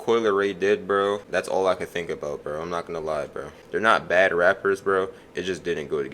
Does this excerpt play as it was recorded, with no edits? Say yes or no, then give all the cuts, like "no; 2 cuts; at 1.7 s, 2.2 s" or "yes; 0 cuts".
no; 2 cuts; at 1.2 s, 3.6 s